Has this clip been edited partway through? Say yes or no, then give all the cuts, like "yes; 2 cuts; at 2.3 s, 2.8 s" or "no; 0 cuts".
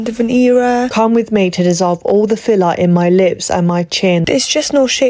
yes; 2 cuts; at 0.9 s, 4.2 s